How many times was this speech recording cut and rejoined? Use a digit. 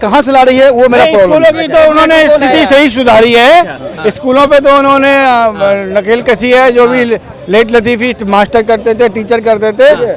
0